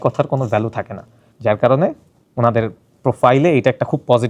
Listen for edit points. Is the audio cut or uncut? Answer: cut